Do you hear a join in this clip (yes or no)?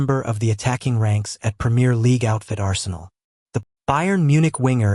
yes